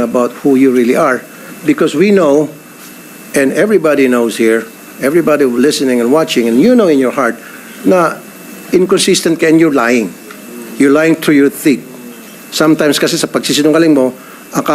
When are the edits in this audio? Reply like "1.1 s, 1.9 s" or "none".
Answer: none